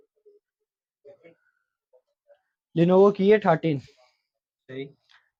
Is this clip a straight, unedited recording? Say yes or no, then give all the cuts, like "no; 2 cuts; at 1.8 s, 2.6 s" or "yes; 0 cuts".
yes; 0 cuts